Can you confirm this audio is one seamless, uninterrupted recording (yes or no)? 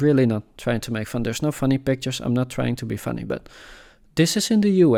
yes